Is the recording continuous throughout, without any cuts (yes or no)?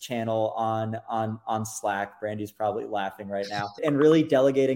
no